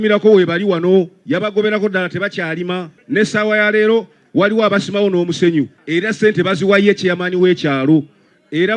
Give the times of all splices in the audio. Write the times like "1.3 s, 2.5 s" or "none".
2.9 s, 5.8 s